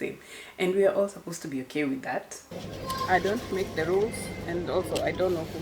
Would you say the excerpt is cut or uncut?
cut